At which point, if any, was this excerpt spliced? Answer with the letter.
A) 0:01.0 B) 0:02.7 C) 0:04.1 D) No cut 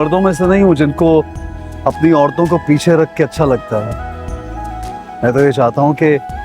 D